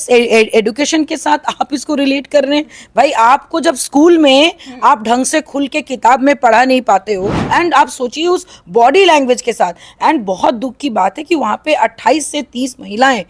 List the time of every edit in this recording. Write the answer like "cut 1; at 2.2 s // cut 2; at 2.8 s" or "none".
cut 1; at 7.4 s